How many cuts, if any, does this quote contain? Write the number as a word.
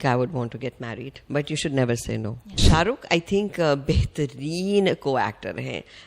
one